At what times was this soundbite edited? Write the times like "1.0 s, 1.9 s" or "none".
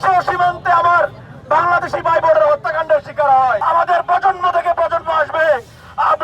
3.6 s